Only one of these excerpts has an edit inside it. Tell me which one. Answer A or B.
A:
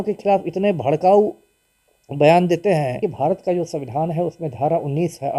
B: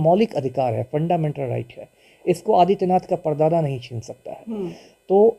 A